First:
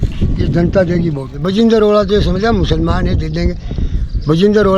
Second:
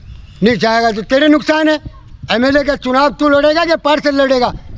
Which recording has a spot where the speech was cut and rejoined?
first; 1 cut; at 1.3 s

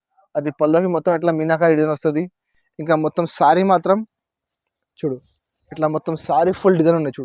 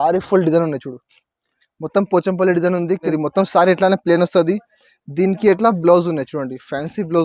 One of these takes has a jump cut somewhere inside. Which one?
second; 1 cut; at 3.1 s

